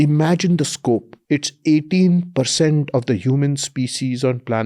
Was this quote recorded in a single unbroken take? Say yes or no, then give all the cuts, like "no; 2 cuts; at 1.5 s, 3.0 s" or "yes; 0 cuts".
no; 1 cut; at 1.1 s